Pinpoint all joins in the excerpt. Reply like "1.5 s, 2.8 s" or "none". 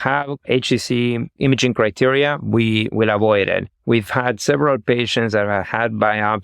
1.3 s, 2.9 s, 3.7 s